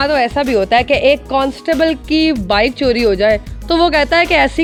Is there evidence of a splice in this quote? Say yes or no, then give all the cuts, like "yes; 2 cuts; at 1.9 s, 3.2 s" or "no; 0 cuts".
no; 0 cuts